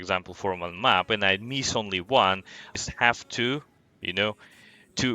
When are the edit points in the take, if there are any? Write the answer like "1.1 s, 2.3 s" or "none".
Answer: 2.7 s